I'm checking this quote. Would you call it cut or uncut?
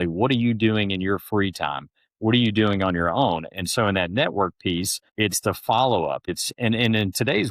cut